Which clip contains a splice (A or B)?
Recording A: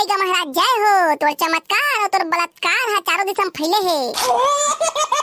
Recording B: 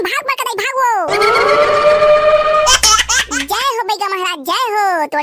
B